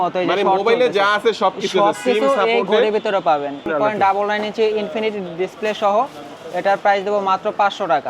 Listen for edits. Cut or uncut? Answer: cut